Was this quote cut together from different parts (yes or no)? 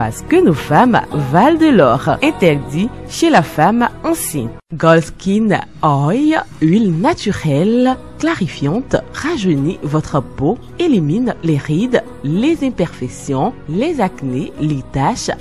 yes